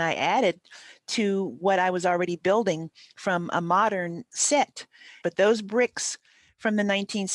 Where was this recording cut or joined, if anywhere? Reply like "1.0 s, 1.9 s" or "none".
5.2 s